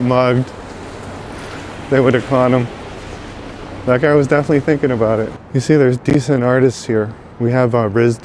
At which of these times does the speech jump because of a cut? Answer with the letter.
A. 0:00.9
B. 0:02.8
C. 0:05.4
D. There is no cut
C